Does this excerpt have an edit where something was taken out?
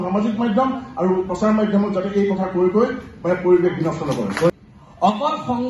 yes; 1 cut; at 4.5 s

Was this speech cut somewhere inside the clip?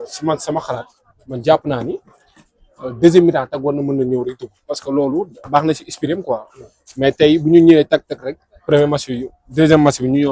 no; 0 cuts

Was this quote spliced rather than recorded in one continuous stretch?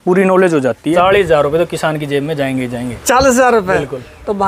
yes; 1 cut; at 0.9 s

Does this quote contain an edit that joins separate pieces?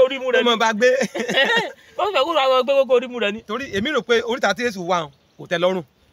no; 0 cuts

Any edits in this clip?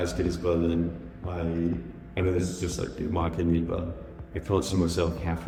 no; 0 cuts

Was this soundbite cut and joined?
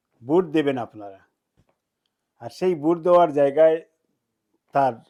no; 0 cuts

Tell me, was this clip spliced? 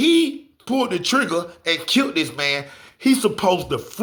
no; 0 cuts

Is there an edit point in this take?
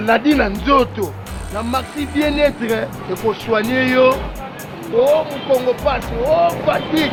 no; 0 cuts

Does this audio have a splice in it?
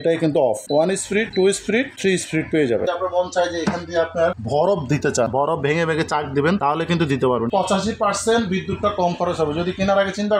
yes; 2 cuts; at 2.8 s, 7.5 s

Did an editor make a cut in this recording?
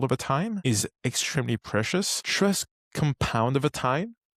yes; 1 cut; at 2.2 s

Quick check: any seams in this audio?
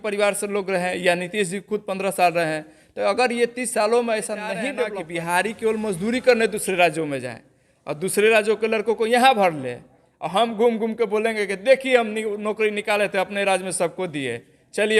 yes; 1 cut; at 4.9 s

